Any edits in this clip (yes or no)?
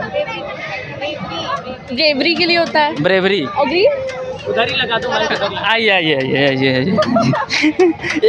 no